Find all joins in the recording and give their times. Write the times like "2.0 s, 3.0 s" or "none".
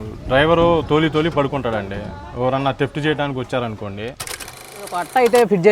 4.8 s